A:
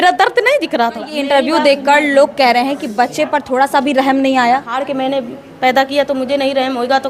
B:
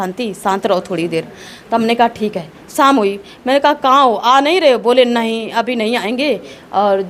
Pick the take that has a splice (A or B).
A